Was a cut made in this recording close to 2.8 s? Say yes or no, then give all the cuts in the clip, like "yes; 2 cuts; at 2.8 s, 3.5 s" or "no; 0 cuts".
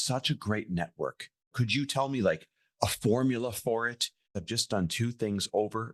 no; 2 cuts; at 1.6 s, 4.4 s